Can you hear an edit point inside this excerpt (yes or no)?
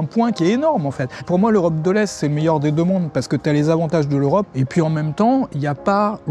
yes